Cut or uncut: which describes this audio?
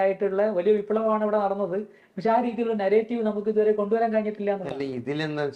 uncut